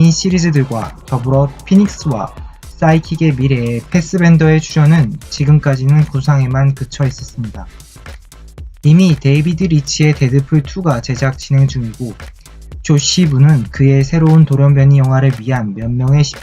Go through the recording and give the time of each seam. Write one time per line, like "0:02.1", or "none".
0:05.2